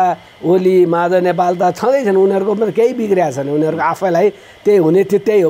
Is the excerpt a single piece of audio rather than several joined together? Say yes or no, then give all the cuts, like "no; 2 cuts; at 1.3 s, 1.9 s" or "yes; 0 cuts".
yes; 0 cuts